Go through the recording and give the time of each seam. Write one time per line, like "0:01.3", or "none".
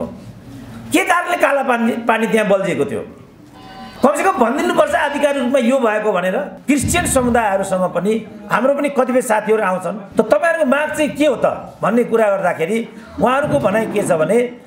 0:06.5
0:10.0